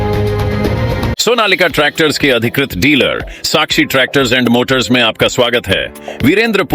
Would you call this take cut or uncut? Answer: cut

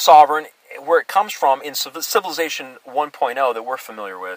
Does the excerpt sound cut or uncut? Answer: uncut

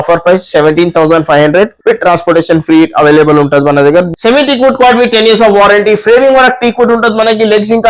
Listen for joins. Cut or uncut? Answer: cut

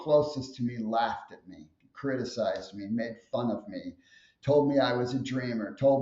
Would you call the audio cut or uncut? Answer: uncut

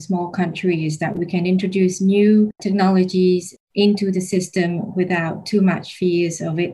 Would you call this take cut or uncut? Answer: cut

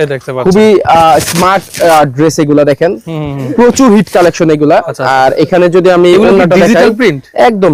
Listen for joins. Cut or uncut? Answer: uncut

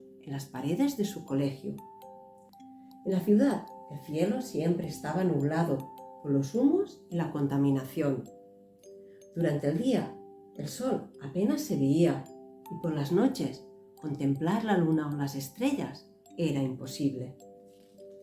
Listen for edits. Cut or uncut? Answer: cut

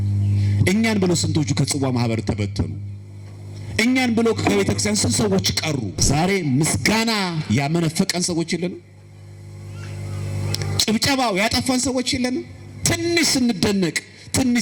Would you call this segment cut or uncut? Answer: cut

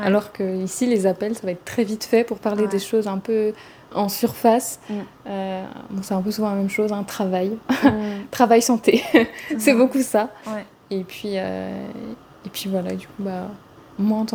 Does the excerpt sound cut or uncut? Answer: uncut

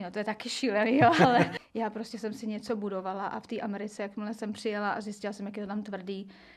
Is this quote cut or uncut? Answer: cut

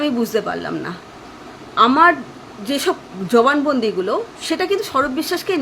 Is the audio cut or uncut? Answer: cut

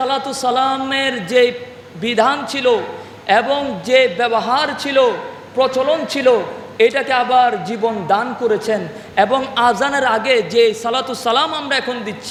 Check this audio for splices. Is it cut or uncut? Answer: uncut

